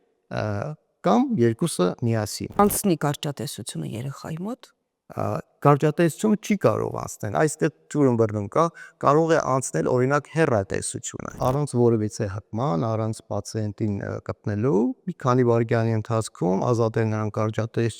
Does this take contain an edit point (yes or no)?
yes